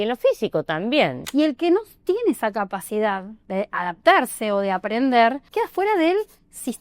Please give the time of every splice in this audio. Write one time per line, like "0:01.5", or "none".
0:01.2
0:03.3
0:05.4